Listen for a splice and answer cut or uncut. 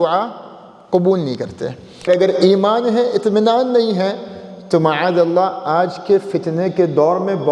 cut